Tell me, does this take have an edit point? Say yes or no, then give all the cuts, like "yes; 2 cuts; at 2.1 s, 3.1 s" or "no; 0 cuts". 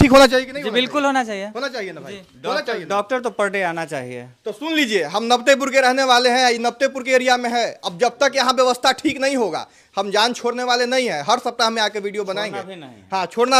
no; 0 cuts